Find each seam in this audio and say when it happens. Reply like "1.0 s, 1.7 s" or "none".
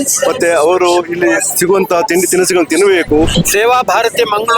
3.4 s

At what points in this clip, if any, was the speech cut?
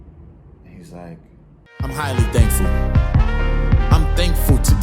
1.6 s

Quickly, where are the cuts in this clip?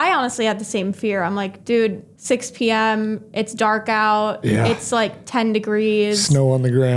2.1 s

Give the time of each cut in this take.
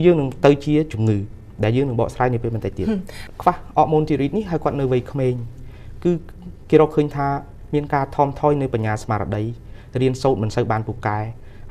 3.1 s

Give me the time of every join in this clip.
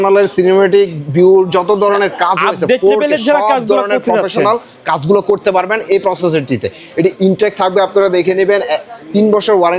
none

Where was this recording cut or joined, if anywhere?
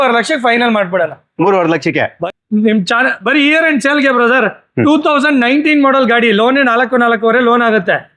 2.2 s

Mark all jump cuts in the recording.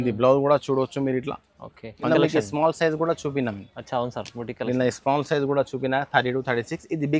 2.1 s

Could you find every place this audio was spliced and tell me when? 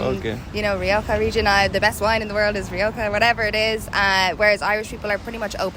none

